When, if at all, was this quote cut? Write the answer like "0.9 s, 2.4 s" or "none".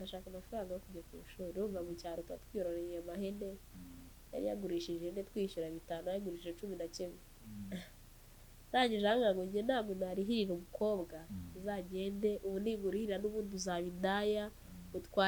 none